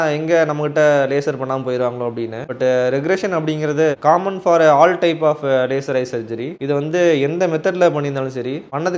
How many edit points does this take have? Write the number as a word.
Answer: zero